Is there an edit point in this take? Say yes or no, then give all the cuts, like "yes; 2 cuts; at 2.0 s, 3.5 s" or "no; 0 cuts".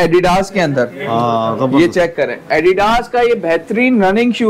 no; 0 cuts